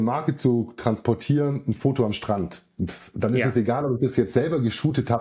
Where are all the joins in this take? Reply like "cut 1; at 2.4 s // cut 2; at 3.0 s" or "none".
none